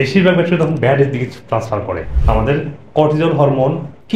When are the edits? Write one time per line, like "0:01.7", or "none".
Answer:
0:02.1